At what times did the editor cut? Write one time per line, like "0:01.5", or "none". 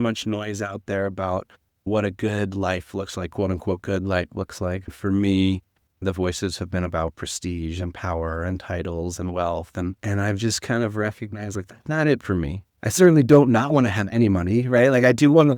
0:04.9
0:10.0

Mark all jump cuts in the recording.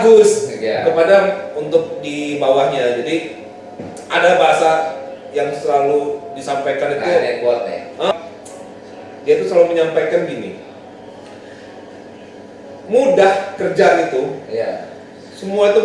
0:08.1

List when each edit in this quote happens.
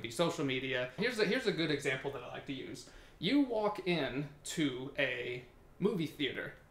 0:01.0

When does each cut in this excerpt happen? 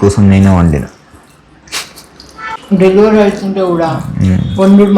0:02.8

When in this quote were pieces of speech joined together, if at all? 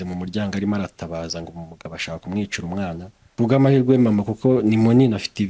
0:03.3

